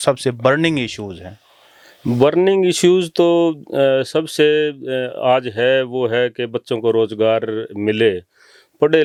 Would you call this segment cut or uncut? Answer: uncut